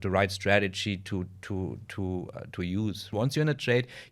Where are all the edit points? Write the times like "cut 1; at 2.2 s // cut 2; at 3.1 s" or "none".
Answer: cut 1; at 3.1 s